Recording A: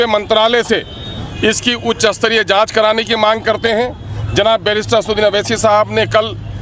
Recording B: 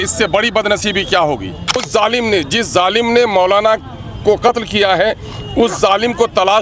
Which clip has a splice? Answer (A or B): B